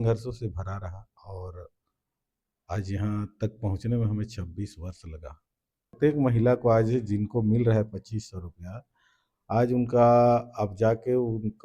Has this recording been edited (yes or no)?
yes